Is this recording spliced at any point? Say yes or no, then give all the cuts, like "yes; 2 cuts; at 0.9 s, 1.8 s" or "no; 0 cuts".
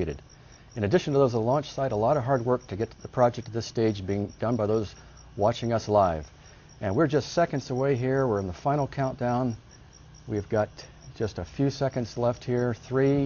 no; 0 cuts